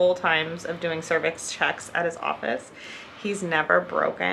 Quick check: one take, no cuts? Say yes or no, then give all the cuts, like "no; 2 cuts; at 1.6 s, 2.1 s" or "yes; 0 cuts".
yes; 0 cuts